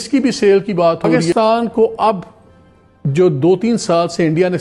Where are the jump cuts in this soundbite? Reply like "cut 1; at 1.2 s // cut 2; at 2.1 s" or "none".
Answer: cut 1; at 1.3 s

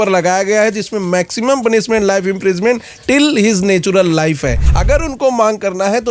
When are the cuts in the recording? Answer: cut 1; at 4.7 s

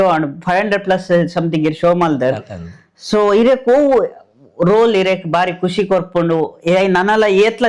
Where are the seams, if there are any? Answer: none

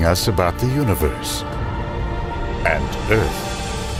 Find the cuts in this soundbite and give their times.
none

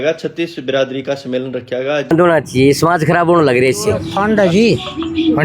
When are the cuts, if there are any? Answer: cut 1; at 2.1 s // cut 2; at 4.1 s

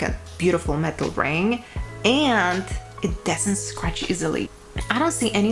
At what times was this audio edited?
cut 1; at 4.5 s

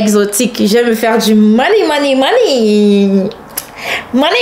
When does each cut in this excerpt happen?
none

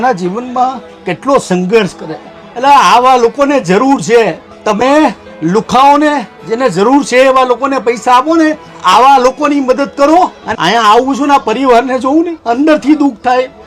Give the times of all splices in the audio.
cut 1; at 10.4 s

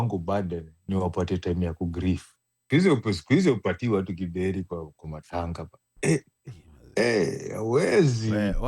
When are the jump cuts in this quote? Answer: cut 1; at 2.6 s

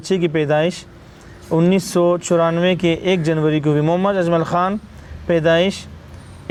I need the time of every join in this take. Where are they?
none

